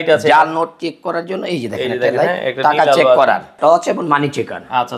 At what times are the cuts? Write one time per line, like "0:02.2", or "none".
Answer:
0:03.6